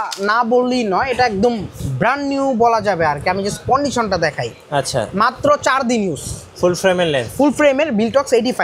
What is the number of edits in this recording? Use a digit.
0